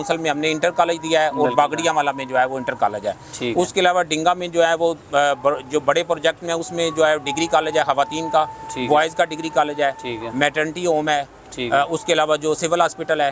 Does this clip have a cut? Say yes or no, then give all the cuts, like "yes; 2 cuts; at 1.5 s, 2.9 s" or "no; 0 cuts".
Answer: no; 0 cuts